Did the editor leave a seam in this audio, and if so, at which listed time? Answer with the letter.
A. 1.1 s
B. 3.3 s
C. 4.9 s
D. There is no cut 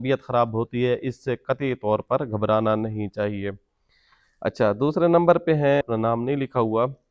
D